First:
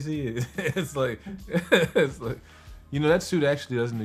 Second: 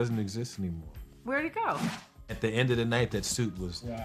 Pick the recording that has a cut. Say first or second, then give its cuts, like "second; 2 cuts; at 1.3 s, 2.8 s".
second; 1 cut; at 2.2 s